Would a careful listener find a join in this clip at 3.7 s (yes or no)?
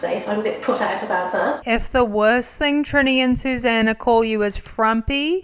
no